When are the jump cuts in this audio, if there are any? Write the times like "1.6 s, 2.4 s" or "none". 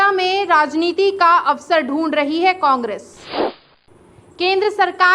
3.6 s